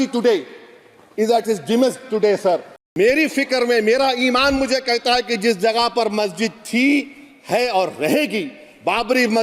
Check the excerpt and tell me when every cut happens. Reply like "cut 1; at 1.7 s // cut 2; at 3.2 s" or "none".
cut 1; at 2.8 s